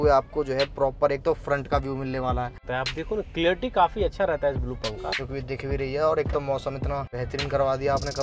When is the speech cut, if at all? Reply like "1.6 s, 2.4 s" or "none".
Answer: 2.6 s, 5.6 s, 7.1 s